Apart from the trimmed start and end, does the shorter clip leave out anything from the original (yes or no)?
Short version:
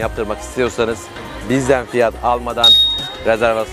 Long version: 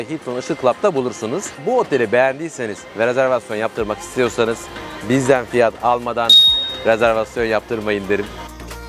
no